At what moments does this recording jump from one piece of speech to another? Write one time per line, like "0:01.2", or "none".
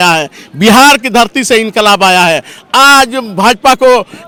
none